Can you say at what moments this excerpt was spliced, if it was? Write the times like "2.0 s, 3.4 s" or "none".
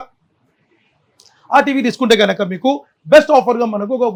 none